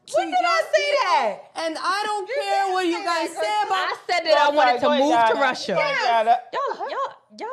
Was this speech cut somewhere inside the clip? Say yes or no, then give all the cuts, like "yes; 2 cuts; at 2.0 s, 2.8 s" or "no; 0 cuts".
no; 0 cuts